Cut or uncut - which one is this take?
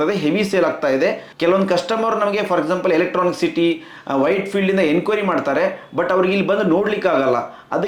uncut